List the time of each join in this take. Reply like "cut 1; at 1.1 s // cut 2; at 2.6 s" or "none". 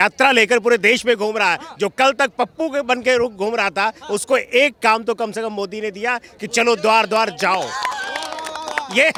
none

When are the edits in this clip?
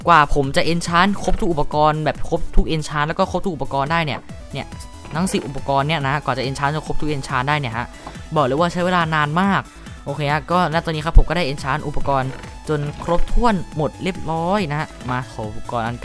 cut 1; at 9.7 s

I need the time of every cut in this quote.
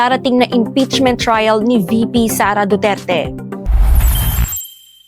cut 1; at 3.5 s

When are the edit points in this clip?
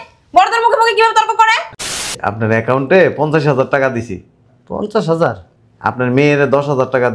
cut 1; at 1.9 s

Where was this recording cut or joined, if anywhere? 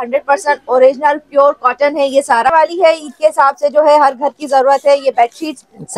cut 1; at 2.5 s

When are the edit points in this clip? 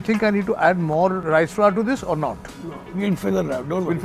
cut 1; at 1.2 s

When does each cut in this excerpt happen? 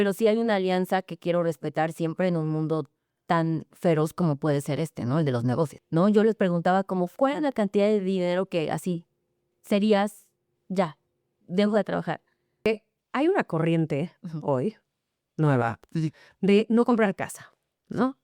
cut 1; at 5.8 s // cut 2; at 12.7 s

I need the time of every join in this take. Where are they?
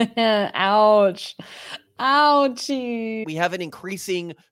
cut 1; at 3.2 s

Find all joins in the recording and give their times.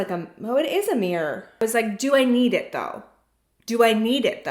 cut 1; at 1.6 s

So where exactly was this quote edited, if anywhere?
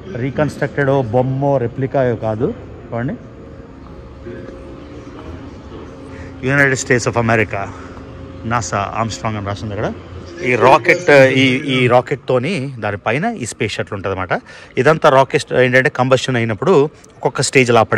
cut 1; at 10.3 s

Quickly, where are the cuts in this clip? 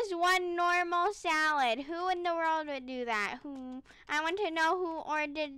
none

